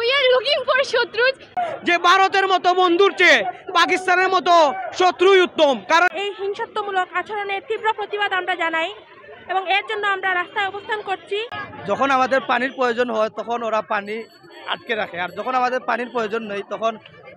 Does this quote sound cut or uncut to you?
cut